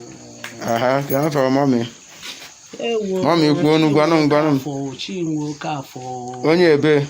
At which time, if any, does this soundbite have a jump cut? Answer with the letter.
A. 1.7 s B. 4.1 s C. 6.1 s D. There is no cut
A